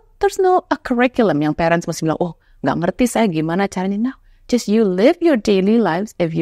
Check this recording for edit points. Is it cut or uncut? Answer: uncut